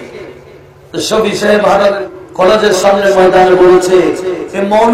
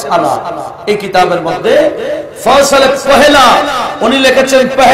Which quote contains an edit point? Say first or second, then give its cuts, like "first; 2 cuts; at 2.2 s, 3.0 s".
first; 1 cut; at 2.0 s